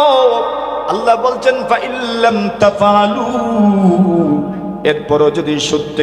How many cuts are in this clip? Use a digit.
0